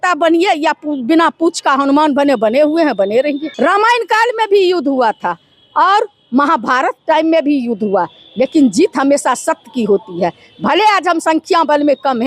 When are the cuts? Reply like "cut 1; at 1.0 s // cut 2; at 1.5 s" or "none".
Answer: cut 1; at 3.5 s